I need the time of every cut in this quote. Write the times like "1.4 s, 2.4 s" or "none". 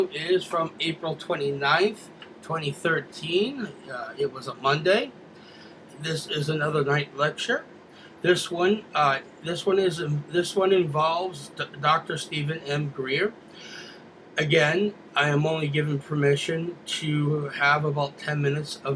none